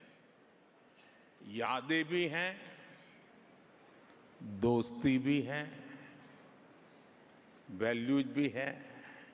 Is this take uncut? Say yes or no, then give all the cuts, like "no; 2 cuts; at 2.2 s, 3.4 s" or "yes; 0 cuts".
yes; 0 cuts